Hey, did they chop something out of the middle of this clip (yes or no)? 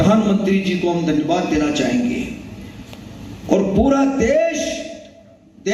no